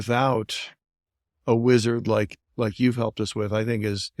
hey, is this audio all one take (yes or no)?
yes